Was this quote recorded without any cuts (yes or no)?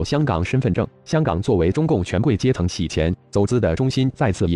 yes